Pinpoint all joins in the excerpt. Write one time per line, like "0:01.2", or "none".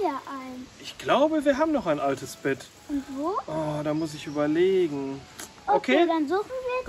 0:05.5